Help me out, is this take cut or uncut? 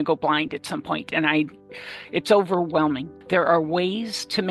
cut